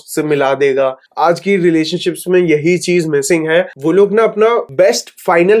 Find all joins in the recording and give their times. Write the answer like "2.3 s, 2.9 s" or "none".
1.0 s, 3.7 s, 4.7 s